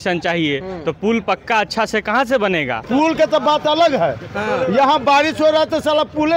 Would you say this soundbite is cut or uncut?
cut